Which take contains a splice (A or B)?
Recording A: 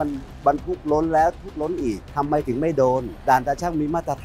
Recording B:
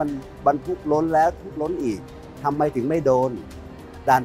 A